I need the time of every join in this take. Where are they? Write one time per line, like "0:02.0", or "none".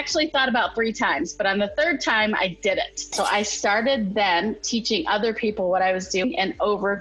0:03.1